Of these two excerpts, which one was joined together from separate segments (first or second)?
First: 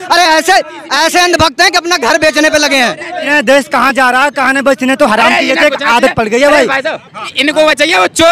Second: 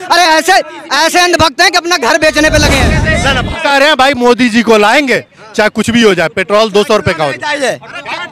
second